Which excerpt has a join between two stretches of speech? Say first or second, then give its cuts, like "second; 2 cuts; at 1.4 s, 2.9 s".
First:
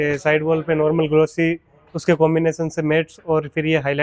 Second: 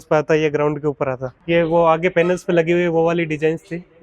second; 1 cut; at 1.3 s